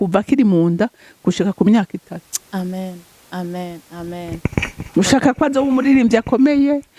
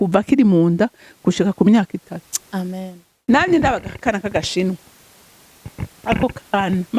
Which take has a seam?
second; 1 cut; at 3.1 s

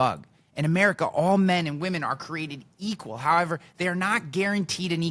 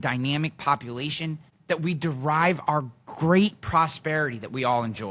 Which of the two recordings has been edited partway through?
second; 1 cut; at 1.5 s

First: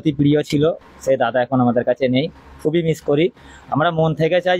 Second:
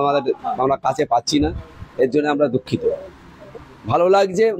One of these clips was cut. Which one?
second; 1 cut; at 3.4 s

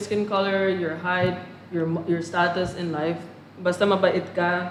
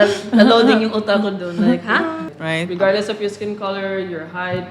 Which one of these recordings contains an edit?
second; 1 cut; at 2.3 s

